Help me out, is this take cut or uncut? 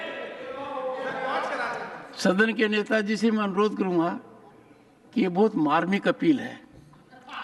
uncut